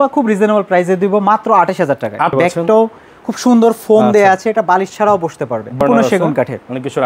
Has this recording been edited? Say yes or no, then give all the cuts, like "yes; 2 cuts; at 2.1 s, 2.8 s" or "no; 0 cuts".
yes; 2 cuts; at 2.3 s, 5.8 s